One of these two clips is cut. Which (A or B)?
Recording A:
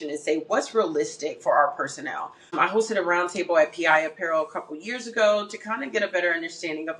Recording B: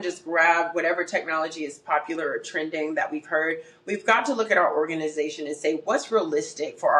A